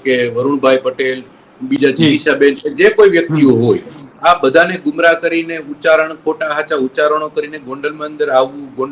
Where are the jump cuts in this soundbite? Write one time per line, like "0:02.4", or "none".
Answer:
none